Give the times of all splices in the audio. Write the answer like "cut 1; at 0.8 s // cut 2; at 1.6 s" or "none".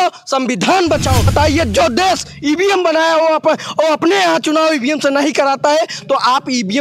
cut 1; at 1.2 s